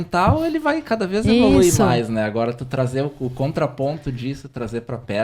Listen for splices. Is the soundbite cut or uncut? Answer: uncut